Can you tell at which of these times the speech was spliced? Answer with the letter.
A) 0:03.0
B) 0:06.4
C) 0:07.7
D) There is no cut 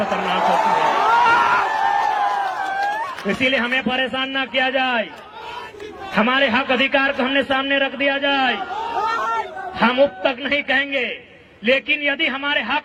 D